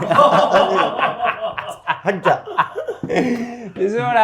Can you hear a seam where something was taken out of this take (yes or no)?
no